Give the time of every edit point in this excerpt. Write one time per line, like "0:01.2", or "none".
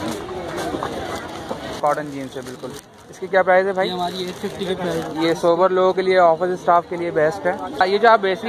0:01.8
0:07.8